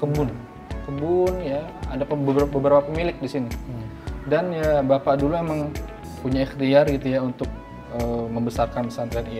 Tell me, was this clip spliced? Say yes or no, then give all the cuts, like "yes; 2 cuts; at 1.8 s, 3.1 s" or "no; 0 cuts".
yes; 1 cut; at 6.2 s